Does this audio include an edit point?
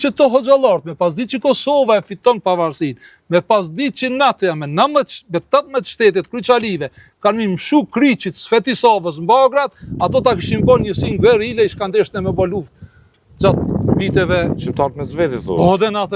no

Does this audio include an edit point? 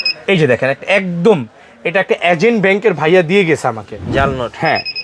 no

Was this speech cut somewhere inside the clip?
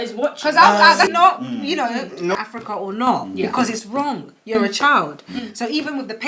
yes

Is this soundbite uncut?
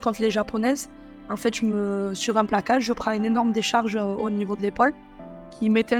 yes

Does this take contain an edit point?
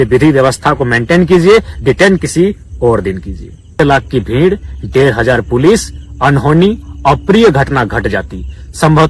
yes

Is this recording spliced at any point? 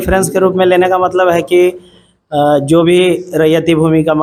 no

